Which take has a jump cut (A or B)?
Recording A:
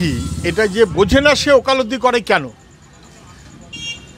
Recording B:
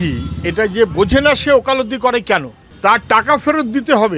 B